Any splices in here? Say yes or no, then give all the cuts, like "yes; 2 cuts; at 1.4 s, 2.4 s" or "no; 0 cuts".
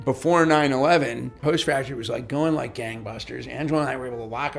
yes; 1 cut; at 1.3 s